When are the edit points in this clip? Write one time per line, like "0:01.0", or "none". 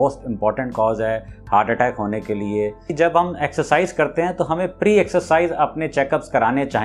0:02.9